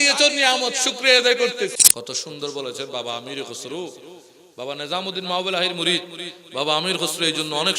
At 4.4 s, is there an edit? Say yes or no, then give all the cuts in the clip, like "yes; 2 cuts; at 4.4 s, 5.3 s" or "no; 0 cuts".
no; 1 cut; at 1.8 s